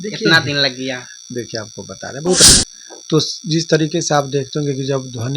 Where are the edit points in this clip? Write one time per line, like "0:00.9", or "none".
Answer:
0:02.4

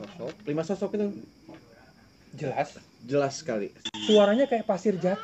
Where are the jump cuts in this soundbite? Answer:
0:03.8

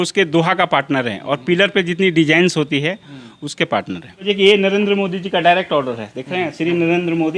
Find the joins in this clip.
0:04.2

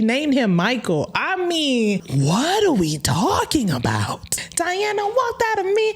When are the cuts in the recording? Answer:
0:02.1
0:04.4

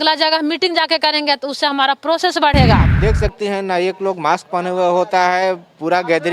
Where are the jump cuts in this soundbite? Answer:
0:02.9

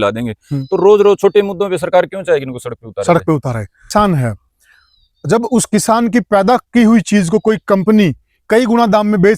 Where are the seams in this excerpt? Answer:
0:03.9

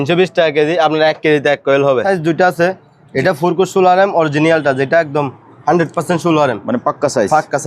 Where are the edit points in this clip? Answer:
0:02.0

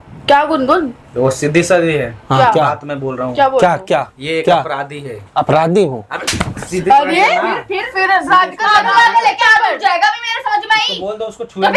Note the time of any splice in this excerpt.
none

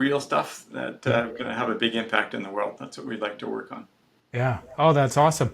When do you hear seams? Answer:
none

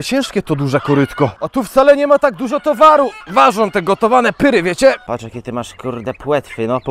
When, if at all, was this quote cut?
0:01.4
0:03.2
0:05.0

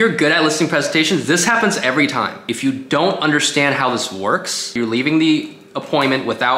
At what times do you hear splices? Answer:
0:02.5
0:04.7

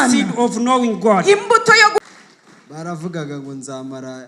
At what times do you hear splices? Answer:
0:02.0

